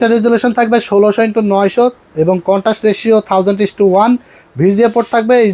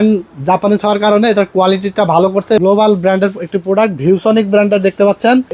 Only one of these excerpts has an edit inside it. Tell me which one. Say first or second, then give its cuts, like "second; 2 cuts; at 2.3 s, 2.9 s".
second; 1 cut; at 2.6 s